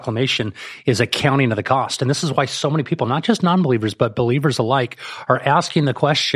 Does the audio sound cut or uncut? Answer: uncut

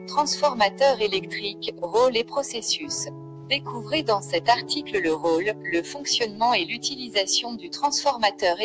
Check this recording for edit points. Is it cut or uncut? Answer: uncut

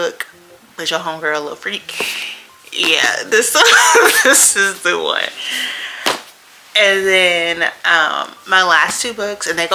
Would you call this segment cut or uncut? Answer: uncut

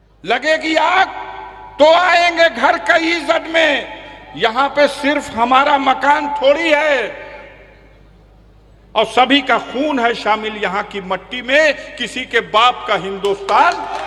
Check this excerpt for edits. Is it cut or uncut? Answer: uncut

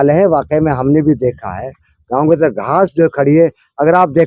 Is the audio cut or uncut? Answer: uncut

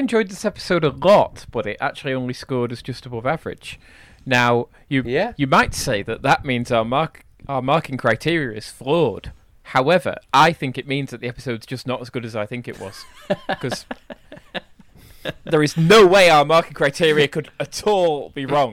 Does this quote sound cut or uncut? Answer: uncut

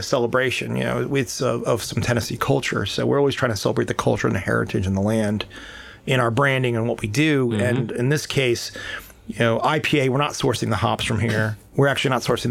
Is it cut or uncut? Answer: uncut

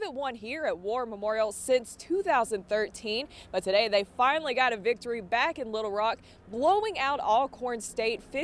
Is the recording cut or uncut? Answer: uncut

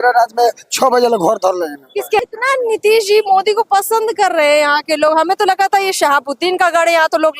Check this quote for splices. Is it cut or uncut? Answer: cut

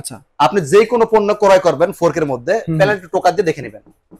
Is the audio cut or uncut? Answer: uncut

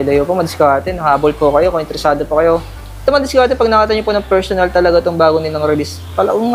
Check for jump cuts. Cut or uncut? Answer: uncut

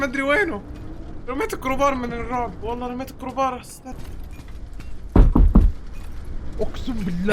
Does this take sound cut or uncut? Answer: cut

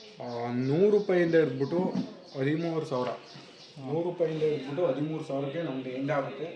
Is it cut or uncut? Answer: uncut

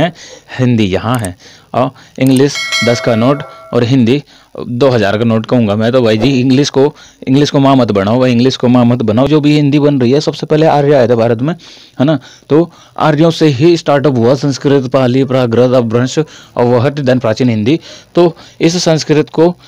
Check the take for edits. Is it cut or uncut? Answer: cut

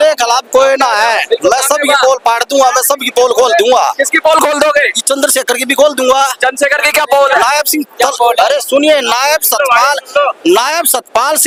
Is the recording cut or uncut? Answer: uncut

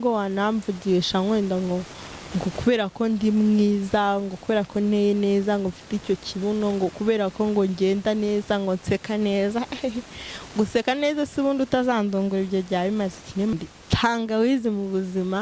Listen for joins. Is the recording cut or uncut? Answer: cut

